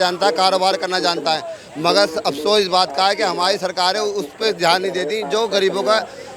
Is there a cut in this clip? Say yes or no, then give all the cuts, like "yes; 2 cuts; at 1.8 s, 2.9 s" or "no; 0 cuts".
no; 0 cuts